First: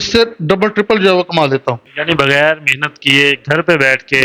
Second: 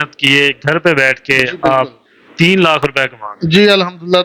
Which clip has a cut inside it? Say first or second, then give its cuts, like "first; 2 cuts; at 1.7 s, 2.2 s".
first; 1 cut; at 1.9 s